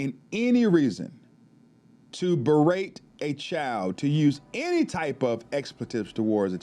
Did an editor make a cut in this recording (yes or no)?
no